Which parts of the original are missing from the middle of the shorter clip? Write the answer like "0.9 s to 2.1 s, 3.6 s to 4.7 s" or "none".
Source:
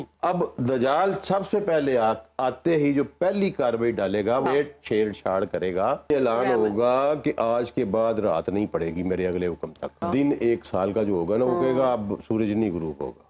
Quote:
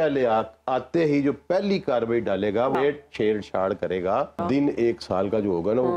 6.0 s to 9.9 s